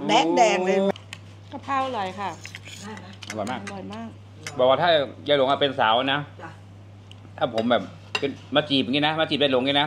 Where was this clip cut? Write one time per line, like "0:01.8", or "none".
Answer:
0:00.9